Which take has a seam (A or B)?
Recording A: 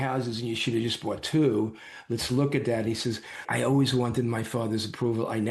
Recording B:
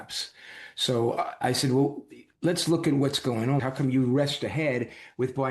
B